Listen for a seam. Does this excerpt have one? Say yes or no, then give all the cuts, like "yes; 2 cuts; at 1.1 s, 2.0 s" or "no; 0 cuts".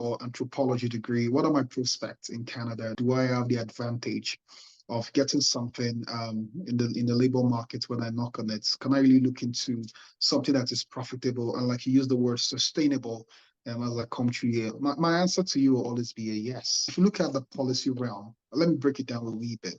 no; 0 cuts